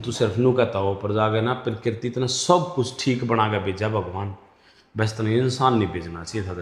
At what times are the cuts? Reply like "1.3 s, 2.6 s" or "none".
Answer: none